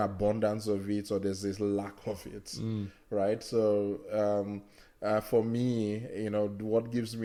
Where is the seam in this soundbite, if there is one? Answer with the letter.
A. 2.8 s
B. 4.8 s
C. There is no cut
C